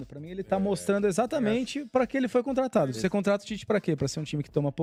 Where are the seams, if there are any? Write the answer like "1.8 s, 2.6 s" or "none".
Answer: none

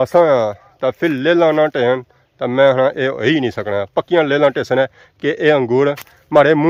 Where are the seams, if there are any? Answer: none

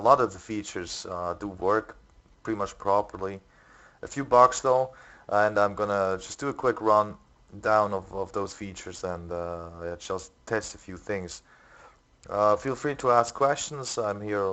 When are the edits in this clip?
none

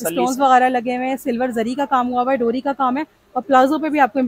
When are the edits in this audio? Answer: none

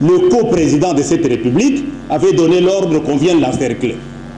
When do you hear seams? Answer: none

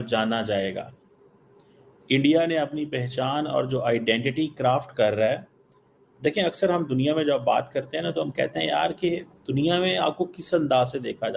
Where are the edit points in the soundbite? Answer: none

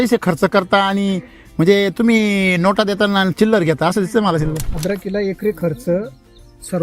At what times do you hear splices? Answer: 4.7 s

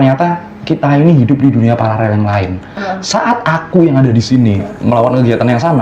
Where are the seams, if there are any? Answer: 2.8 s

